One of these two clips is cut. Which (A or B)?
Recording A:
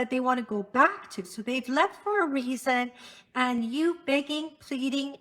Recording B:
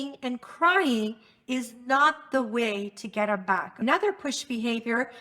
B